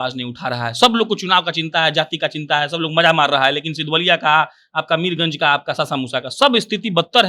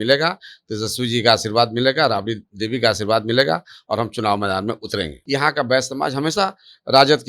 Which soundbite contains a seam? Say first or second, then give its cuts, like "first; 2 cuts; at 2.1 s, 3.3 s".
second; 1 cut; at 5.2 s